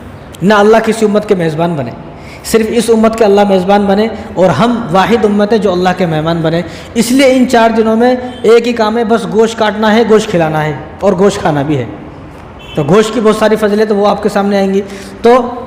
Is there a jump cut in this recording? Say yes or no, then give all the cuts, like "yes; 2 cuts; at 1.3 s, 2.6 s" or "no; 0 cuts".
no; 0 cuts